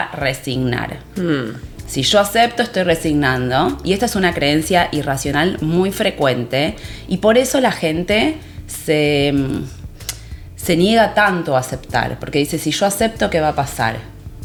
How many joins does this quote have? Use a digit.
0